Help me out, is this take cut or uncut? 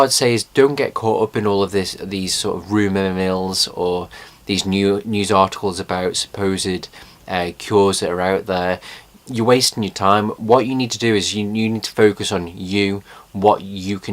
cut